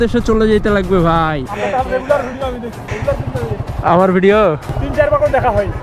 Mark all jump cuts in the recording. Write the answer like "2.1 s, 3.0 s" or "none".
1.5 s, 2.9 s, 4.7 s